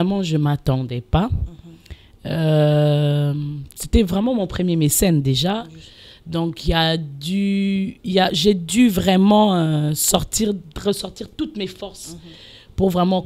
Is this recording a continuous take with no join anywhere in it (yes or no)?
yes